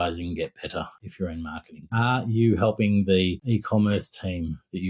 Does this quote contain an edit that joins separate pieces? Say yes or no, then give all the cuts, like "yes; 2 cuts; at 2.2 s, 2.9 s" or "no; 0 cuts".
yes; 2 cuts; at 1.2 s, 3.4 s